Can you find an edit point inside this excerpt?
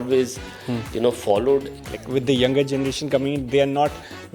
yes; 1 cut; at 1.8 s

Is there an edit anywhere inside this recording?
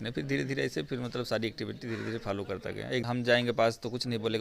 yes; 1 cut; at 3.0 s

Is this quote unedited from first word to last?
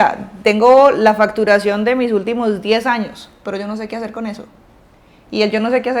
yes; 0 cuts

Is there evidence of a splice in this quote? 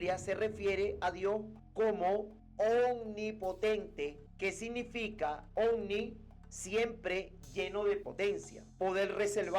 yes; 1 cut; at 5.4 s

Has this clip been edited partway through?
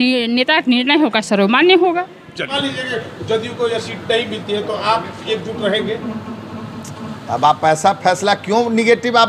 yes; 1 cut; at 2.5 s

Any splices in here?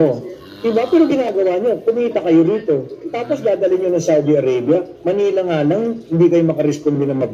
no; 0 cuts

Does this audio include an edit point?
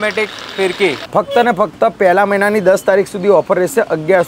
yes; 1 cut; at 1.0 s

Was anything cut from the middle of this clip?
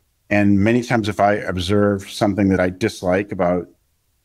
yes; 1 cut; at 2.6 s

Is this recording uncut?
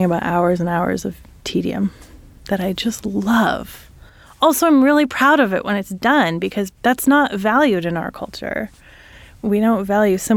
no; 2 cuts; at 6.7 s, 9.4 s

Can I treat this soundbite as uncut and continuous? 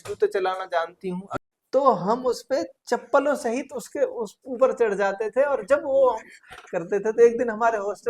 no; 1 cut; at 1.3 s

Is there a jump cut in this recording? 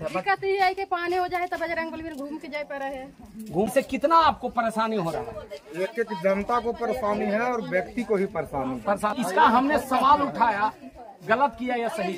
yes; 2 cuts; at 3.7 s, 9.1 s

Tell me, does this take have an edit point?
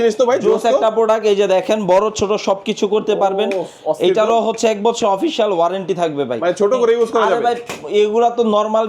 no; 0 cuts

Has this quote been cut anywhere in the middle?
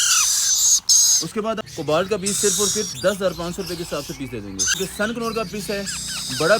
yes; 2 cuts; at 1.6 s, 4.8 s

